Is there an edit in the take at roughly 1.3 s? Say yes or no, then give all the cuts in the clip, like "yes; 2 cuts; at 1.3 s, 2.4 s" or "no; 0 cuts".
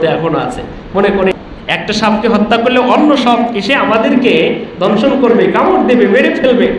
yes; 1 cut; at 1.3 s